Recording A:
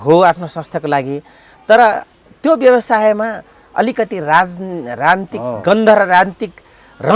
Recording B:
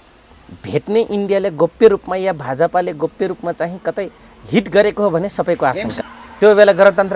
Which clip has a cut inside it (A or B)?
B